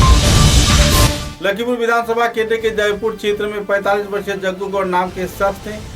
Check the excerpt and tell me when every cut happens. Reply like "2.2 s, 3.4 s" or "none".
1.1 s